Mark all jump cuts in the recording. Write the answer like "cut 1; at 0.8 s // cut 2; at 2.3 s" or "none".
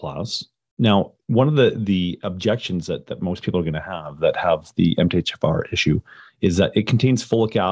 none